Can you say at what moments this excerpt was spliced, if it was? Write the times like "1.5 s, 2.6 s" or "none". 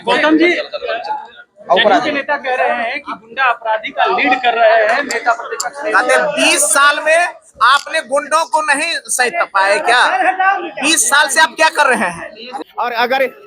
12.6 s

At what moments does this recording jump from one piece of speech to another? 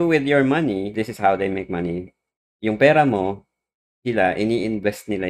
0.9 s

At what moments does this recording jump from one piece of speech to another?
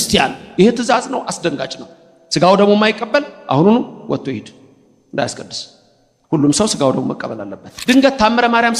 7.7 s

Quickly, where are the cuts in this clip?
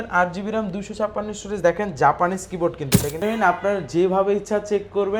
3.2 s

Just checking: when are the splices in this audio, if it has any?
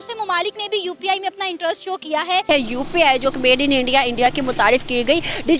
2.4 s

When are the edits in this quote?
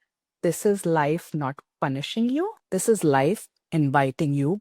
2.6 s

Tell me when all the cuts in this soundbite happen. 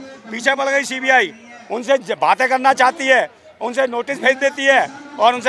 none

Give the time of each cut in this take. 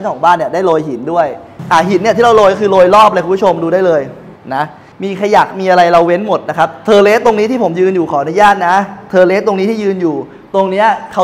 1.5 s, 4.8 s

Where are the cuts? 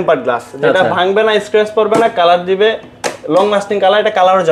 none

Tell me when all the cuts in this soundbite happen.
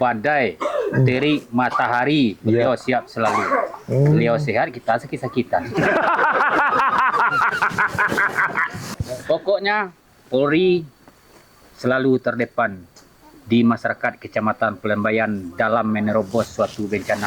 9.0 s

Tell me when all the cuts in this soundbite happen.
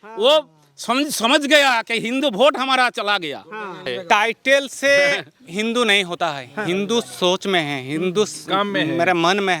3.8 s

